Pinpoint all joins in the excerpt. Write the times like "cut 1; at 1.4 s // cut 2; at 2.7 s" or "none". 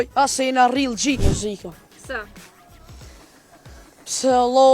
cut 1; at 1.3 s